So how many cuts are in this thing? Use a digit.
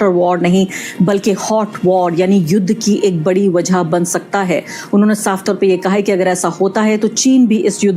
0